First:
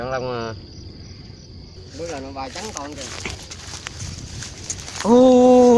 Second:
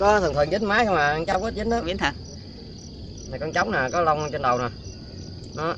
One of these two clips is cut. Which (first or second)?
first